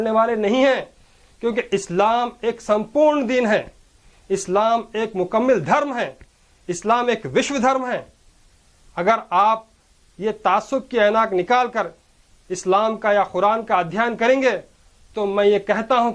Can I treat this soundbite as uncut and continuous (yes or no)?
yes